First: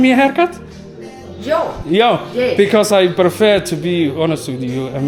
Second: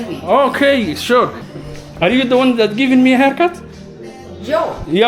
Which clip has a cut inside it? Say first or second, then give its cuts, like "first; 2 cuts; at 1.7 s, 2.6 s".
second; 1 cut; at 1.4 s